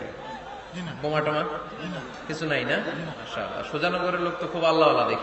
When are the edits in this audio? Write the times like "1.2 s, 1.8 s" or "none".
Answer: 3.2 s